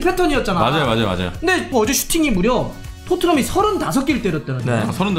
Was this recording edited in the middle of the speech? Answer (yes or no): yes